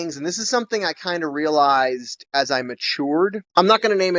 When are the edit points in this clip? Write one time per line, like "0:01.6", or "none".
none